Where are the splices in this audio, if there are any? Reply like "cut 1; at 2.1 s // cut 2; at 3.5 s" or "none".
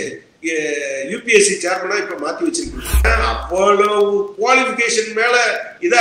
cut 1; at 3.0 s